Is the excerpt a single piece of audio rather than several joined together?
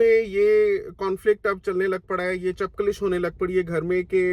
yes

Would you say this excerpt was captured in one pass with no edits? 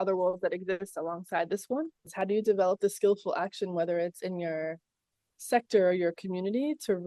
no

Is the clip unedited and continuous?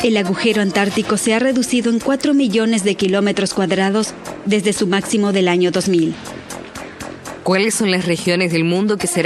no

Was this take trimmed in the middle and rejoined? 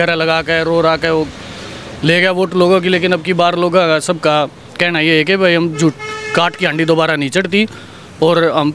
no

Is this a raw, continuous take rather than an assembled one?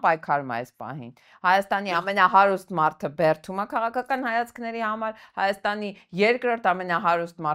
yes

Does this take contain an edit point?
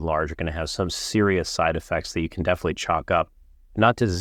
no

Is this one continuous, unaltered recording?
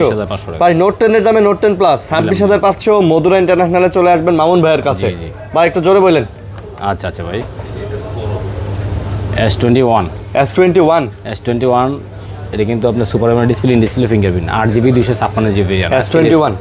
yes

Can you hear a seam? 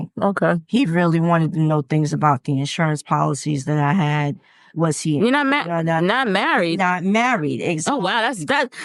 no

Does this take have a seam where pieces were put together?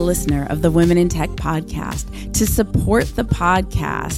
no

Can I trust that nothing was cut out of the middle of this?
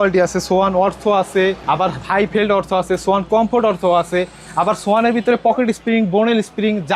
yes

